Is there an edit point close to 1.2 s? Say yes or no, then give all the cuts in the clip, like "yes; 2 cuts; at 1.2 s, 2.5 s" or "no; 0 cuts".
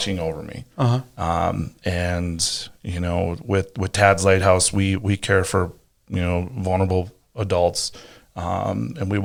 no; 0 cuts